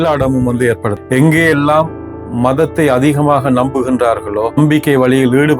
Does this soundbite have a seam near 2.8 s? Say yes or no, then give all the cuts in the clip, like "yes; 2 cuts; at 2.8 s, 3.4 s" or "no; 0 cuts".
no; 2 cuts; at 1.0 s, 4.6 s